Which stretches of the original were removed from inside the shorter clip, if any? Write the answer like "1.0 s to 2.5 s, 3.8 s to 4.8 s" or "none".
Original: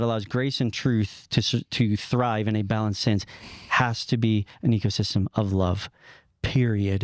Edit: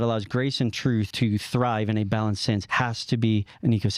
1.1 s to 1.7 s, 3.3 s to 3.7 s

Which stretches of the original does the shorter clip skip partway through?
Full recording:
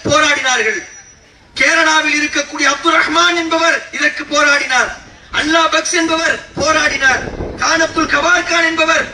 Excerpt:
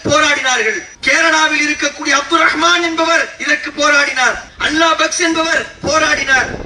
0.9 s to 1.4 s, 5.0 s to 5.2 s

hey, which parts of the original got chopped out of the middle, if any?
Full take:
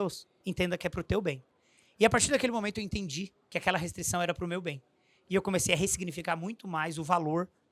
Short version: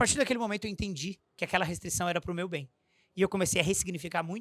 none

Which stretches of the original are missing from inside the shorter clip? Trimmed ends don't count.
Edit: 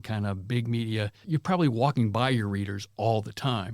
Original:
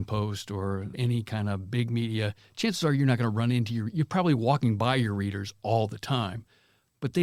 2.4 s to 3.9 s

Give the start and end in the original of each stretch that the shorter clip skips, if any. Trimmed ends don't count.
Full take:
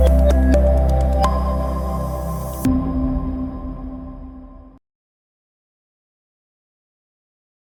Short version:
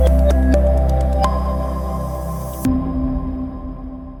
none

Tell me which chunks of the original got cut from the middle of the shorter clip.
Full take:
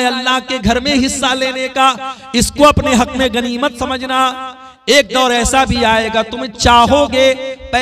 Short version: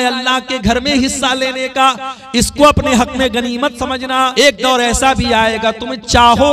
4.3 s to 4.8 s

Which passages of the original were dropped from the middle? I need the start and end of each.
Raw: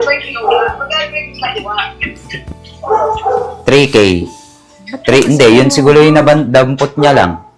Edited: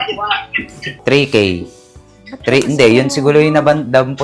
2.4 s to 3.5 s

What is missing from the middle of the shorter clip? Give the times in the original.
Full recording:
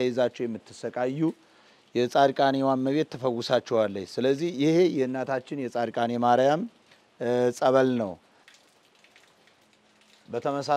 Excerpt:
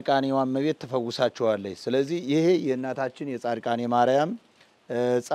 none

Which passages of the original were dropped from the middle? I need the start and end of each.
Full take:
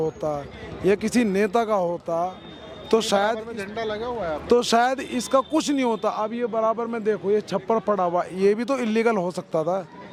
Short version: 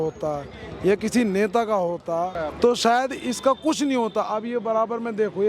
2.4 s to 4.3 s

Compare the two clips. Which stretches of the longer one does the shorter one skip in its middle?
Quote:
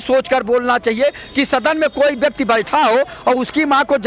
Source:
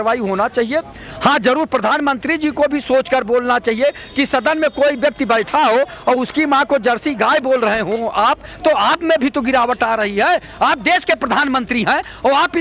none

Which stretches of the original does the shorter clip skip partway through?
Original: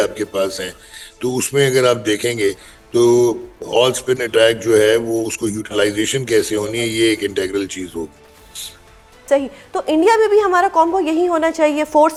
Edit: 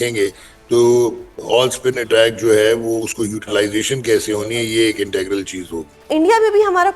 8.3 s to 9.8 s

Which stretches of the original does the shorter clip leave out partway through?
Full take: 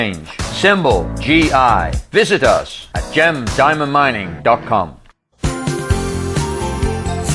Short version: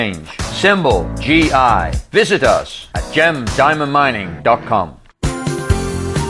5.0 s to 5.2 s

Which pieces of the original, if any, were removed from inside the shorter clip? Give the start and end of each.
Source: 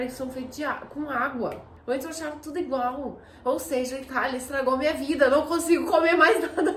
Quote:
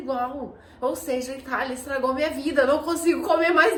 none

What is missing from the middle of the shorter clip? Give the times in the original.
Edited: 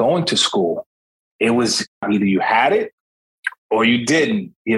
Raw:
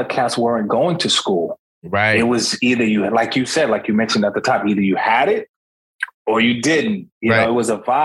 2.7 s to 4.6 s

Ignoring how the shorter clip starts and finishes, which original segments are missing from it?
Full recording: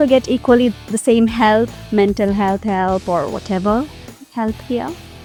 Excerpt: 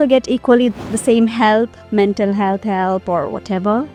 none

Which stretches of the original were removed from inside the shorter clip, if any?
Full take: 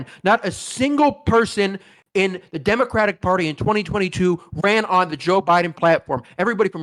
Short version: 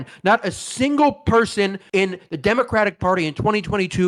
1.8 s to 2.0 s

